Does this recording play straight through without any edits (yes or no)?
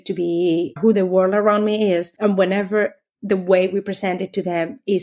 no